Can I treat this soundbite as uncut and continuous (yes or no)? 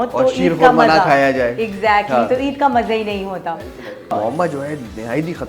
no